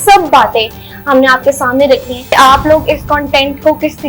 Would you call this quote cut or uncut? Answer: cut